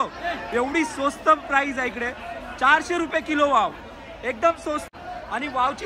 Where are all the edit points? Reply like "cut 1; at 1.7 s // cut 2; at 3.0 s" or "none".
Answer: cut 1; at 4.8 s